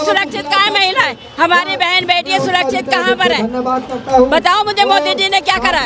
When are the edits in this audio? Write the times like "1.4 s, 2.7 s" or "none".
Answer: none

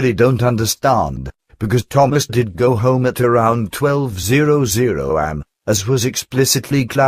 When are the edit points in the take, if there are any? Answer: 5.8 s

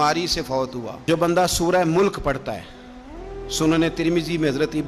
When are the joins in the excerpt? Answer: 1.0 s

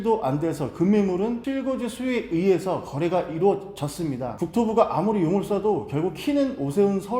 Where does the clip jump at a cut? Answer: 4.4 s

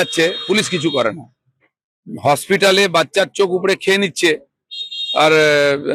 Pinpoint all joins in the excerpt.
none

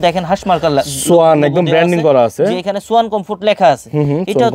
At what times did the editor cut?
none

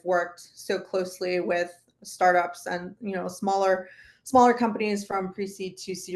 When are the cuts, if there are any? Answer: none

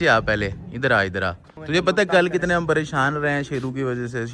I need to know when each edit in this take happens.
1.5 s

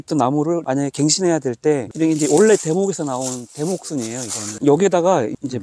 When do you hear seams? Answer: 1.9 s

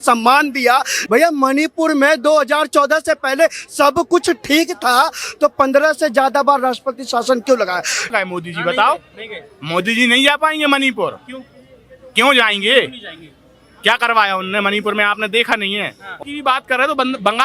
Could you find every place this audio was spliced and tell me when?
1.0 s, 8.1 s, 16.1 s

